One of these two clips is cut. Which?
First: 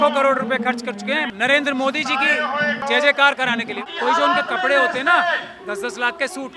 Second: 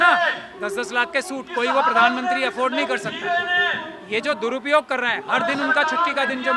first; 3 cuts; at 1.3 s, 2.8 s, 3.8 s

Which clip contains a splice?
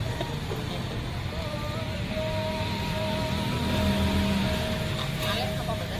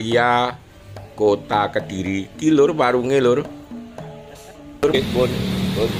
second; 1 cut; at 5.0 s

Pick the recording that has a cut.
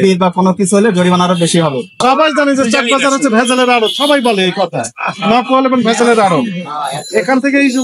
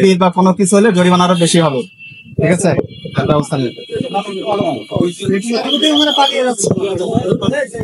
first; 1 cut; at 2.0 s

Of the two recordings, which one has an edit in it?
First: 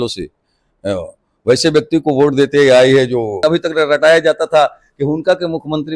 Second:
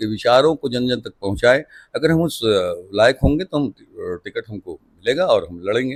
first; 1 cut; at 3.8 s

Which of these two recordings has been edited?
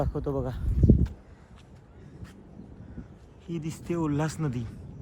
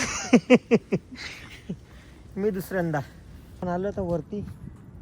second; 1 cut; at 3.6 s

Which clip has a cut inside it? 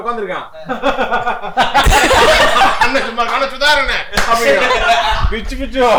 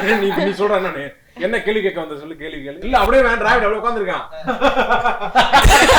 second; 1 cut; at 2.8 s

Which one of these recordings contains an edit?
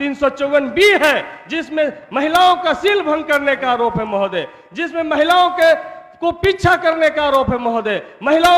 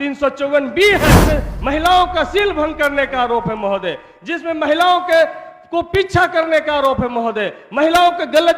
second; 1 cut; at 1.2 s

